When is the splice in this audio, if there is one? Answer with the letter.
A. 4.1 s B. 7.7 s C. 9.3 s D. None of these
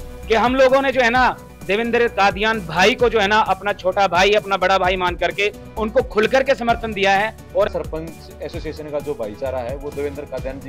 B